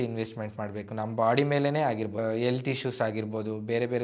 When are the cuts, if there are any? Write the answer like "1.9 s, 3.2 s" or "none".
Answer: 2.2 s